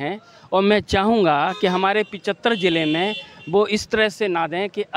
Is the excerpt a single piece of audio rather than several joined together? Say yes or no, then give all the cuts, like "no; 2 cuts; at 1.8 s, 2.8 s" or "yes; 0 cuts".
yes; 0 cuts